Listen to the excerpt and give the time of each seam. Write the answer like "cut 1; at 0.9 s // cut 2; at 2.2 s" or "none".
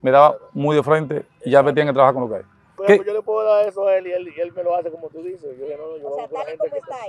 cut 1; at 2.7 s